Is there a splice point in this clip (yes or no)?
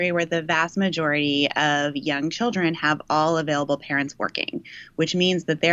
no